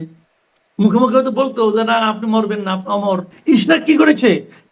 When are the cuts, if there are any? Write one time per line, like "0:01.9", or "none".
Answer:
0:03.3